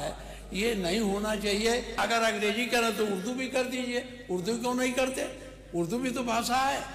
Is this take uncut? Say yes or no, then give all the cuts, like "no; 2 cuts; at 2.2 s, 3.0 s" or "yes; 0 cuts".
no; 1 cut; at 2.0 s